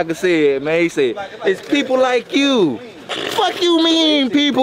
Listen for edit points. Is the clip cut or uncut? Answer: uncut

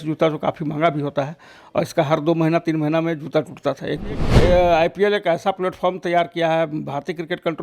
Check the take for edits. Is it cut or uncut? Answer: cut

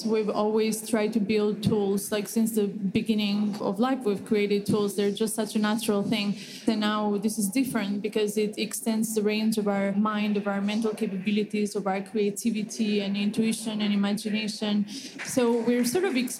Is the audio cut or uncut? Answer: cut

